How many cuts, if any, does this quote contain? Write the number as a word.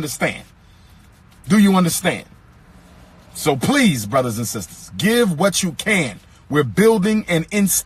one